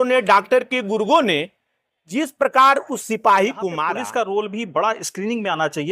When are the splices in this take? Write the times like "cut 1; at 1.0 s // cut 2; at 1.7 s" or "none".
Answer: cut 1; at 3.9 s